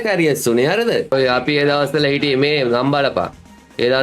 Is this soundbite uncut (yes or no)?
no